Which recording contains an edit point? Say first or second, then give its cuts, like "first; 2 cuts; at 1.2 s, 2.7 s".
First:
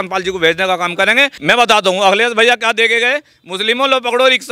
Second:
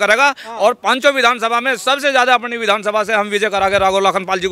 first; 1 cut; at 1.3 s